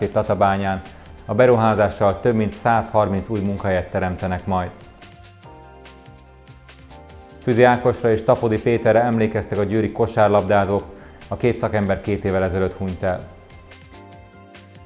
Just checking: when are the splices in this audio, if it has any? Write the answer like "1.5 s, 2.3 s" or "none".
13.9 s